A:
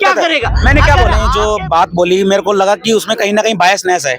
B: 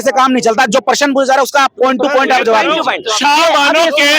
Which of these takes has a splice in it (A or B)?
A